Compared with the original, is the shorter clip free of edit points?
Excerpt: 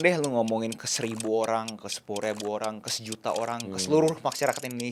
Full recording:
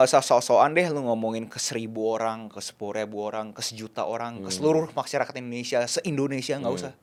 yes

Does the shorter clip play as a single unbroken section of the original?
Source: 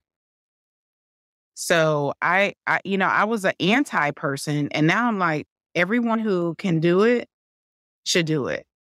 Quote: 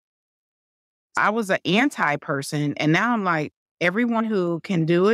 no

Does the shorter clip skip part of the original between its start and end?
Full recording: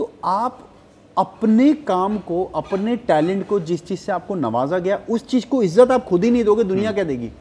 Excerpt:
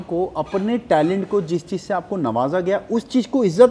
no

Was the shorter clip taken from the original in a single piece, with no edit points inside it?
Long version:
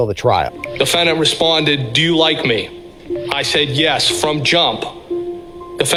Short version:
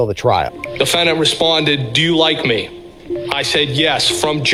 yes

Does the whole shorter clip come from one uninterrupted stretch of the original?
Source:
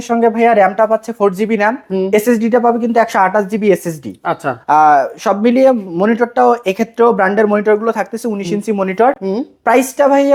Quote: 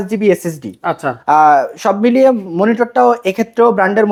yes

